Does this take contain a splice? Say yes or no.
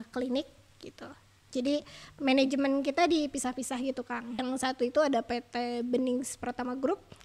yes